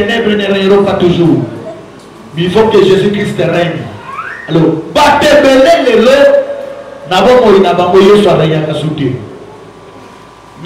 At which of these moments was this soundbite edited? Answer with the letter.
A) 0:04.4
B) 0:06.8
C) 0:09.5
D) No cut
D